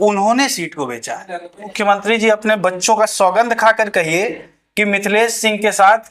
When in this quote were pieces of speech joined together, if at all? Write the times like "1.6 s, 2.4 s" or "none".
1.7 s